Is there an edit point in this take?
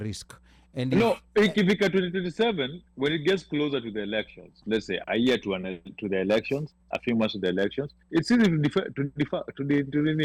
no; 0 cuts

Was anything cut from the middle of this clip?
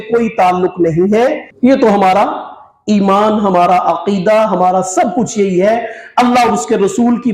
yes; 1 cut; at 1.5 s

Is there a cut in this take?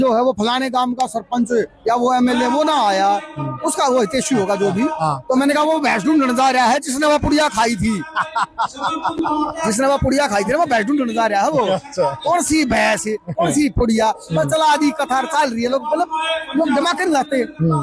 no; 0 cuts

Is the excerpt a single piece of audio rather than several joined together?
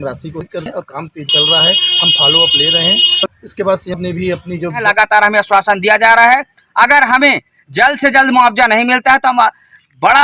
no; 2 cuts; at 3.2 s, 4.8 s

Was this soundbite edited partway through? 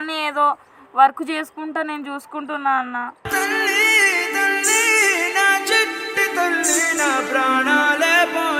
no; 0 cuts

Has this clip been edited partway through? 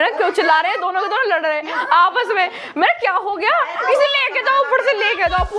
no; 0 cuts

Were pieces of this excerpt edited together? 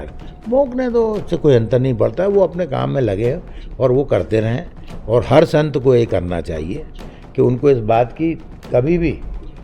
no; 0 cuts

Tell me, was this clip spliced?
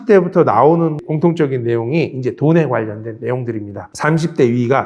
yes; 1 cut; at 1.1 s

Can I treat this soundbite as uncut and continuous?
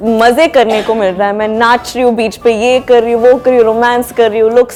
yes; 0 cuts

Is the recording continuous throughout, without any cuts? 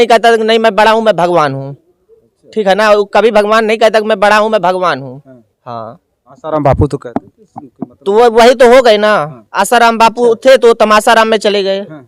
yes; 0 cuts

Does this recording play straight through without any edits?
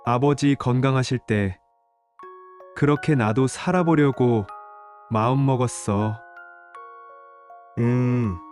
yes; 0 cuts

